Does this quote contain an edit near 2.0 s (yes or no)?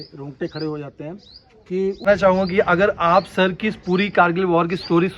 yes